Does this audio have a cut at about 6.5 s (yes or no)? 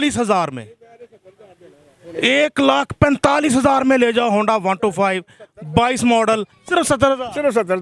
yes